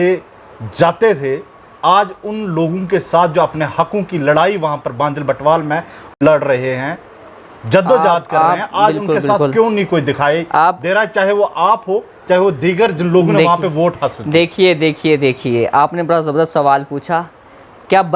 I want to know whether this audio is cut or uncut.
cut